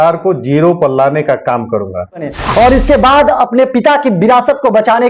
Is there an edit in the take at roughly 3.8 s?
no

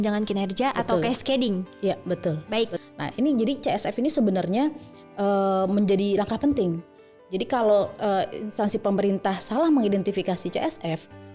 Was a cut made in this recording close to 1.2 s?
no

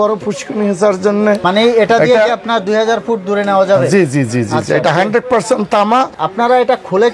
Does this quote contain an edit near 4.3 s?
no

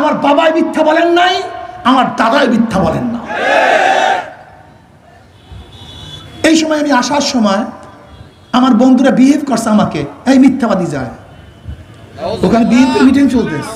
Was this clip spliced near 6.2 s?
yes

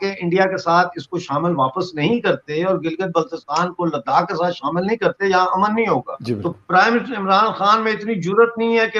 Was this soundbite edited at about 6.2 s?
yes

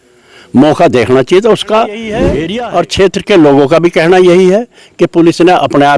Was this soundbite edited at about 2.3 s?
yes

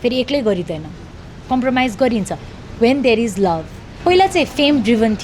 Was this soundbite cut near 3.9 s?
yes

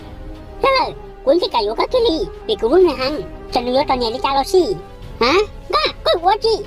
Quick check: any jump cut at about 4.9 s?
yes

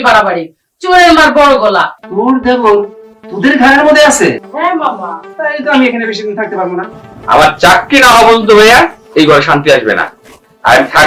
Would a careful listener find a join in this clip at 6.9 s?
yes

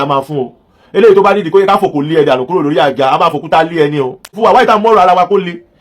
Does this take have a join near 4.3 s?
yes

